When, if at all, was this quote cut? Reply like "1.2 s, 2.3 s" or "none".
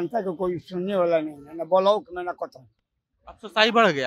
none